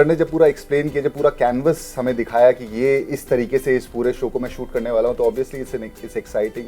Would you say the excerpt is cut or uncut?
uncut